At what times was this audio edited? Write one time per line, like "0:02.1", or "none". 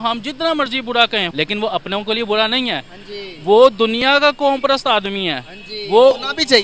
0:01.3